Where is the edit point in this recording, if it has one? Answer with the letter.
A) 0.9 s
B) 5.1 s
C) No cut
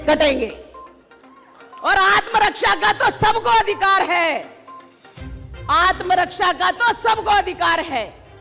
C